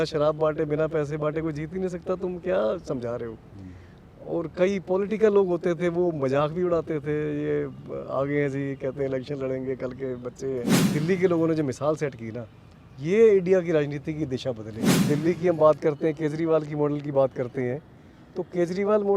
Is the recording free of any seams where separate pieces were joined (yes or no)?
no